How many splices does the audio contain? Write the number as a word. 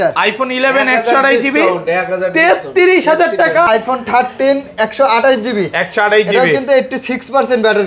one